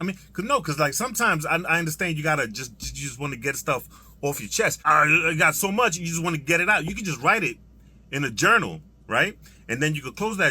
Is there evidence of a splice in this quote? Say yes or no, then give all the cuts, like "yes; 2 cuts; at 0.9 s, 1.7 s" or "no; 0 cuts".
yes; 1 cut; at 4.8 s